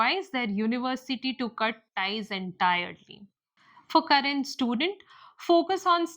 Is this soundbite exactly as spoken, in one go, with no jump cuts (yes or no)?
no